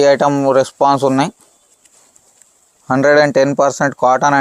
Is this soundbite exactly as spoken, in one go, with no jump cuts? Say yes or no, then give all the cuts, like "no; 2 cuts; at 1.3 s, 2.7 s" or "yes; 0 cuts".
yes; 0 cuts